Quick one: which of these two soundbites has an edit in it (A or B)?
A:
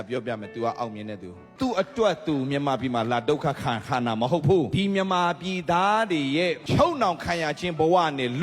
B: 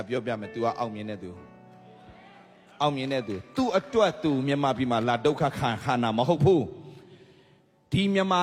A